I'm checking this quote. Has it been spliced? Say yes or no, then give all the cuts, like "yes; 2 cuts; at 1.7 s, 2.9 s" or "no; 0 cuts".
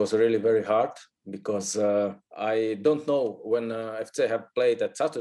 yes; 1 cut; at 2.3 s